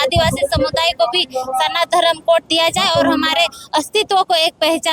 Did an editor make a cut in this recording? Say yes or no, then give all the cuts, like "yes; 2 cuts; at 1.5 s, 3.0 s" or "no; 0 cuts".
no; 0 cuts